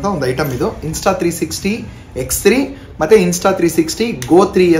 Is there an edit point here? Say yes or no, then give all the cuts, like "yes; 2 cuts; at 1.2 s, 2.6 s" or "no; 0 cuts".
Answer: no; 0 cuts